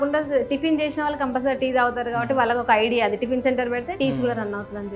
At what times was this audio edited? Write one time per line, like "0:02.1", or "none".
0:03.9